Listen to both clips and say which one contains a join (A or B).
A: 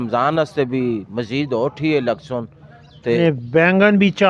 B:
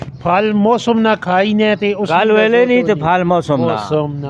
A